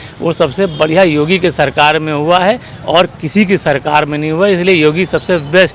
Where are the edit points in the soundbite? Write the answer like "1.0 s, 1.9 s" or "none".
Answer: none